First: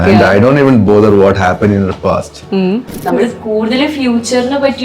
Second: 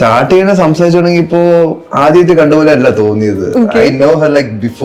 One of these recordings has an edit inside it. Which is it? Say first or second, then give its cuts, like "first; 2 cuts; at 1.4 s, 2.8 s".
first; 1 cut; at 2.9 s